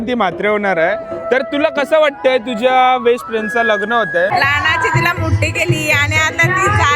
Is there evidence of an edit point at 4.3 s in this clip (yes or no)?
yes